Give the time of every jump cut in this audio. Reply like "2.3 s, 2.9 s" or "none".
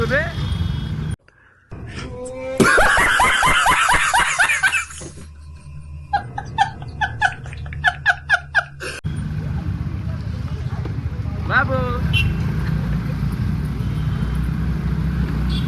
none